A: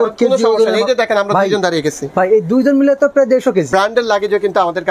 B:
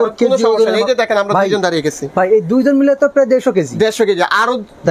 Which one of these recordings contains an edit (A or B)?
A